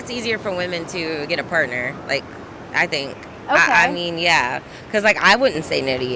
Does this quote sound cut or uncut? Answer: uncut